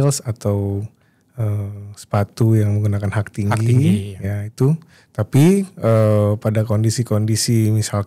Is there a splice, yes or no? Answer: yes